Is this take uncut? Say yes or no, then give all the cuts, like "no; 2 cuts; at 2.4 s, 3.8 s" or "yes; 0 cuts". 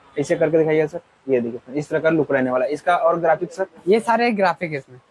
yes; 0 cuts